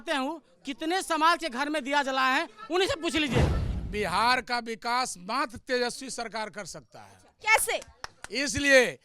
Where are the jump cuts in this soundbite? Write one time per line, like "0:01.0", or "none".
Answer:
0:03.6